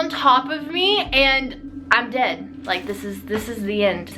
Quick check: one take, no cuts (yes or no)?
no